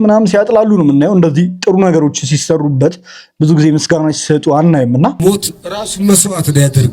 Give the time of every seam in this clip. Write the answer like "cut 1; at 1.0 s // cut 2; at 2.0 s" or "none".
cut 1; at 5.2 s